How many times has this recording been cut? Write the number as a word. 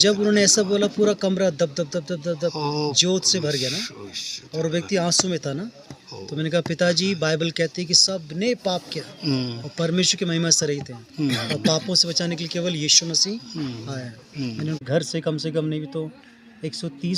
one